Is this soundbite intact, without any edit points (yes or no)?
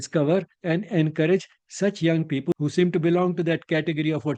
no